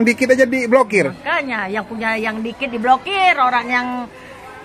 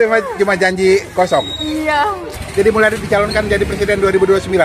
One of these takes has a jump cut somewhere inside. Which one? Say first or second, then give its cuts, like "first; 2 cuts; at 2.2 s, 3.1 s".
second; 1 cut; at 2.4 s